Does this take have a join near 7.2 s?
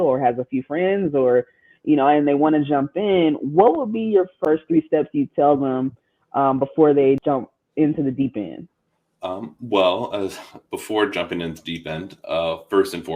yes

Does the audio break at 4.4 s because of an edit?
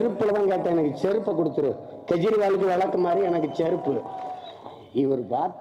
yes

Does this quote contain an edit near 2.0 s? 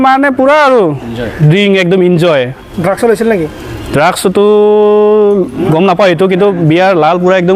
no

